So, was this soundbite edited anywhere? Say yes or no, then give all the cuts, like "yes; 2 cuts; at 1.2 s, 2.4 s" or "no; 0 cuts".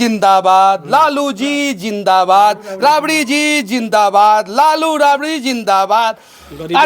no; 0 cuts